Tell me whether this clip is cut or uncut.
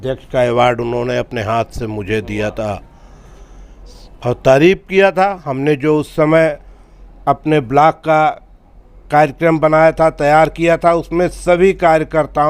uncut